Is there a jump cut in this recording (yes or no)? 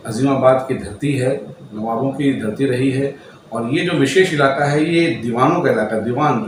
no